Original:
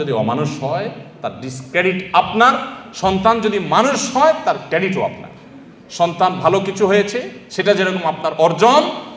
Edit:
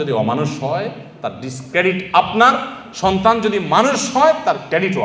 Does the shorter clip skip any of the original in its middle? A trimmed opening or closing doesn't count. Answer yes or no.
no